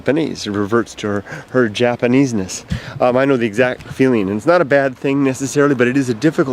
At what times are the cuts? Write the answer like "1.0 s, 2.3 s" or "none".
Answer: 2.4 s